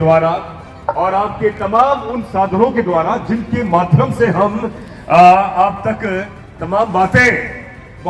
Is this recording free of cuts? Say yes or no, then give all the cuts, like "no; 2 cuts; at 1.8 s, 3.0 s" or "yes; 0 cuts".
yes; 0 cuts